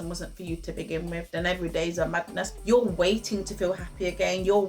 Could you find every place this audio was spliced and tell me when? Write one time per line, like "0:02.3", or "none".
0:02.5

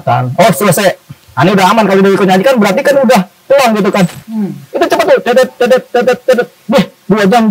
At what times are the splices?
0:04.2

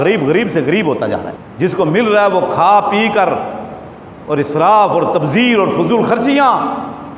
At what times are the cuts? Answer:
0:01.4

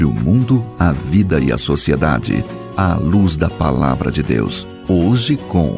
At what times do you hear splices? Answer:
0:04.8

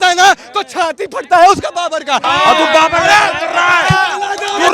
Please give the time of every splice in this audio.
0:02.3

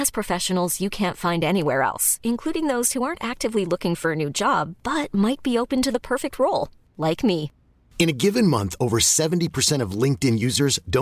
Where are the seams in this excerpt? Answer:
none

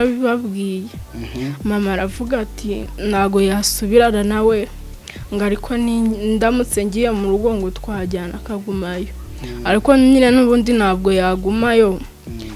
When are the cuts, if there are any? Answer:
none

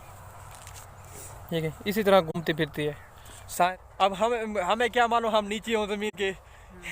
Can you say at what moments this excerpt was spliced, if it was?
0:03.6

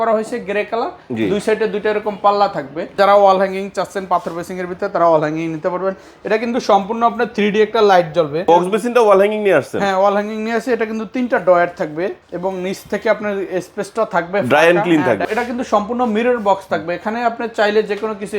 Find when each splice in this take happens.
0:03.0
0:08.5
0:15.2

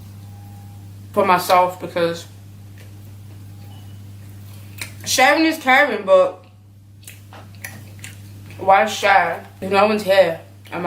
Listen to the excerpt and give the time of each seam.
0:01.1
0:09.5

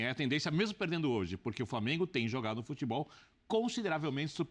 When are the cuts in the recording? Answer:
0:02.8

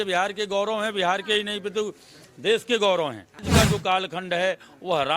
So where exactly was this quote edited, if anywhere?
0:03.5

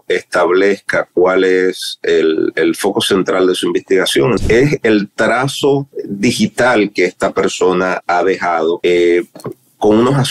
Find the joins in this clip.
0:04.4
0:06.0
0:08.8

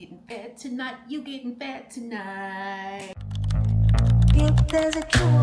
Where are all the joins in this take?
0:03.4

